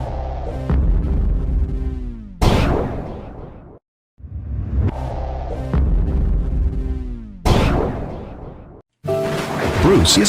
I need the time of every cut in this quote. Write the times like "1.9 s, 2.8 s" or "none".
3.1 s